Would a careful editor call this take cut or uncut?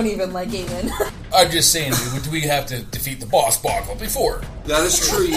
cut